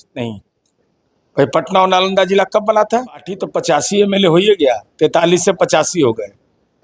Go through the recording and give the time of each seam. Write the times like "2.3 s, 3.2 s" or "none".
3.5 s

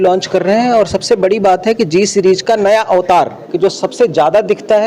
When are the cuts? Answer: 3.4 s

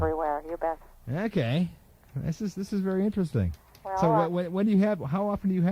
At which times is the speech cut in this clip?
none

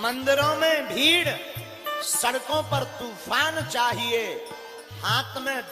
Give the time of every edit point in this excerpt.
none

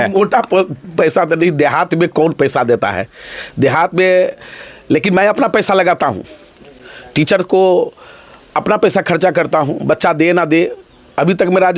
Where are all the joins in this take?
none

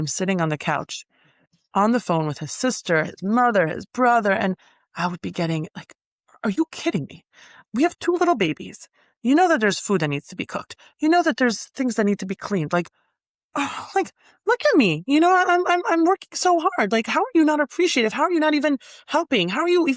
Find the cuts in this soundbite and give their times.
none

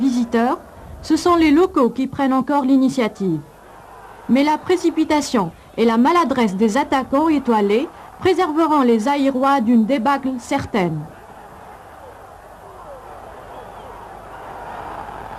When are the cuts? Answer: 8.0 s

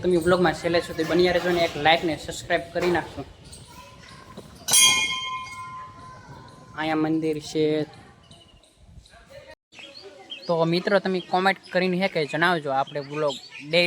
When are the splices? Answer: 9.5 s

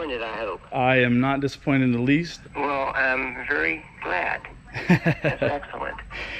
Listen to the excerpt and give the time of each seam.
2.3 s

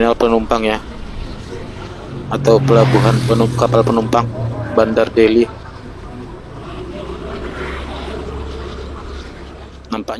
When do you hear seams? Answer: none

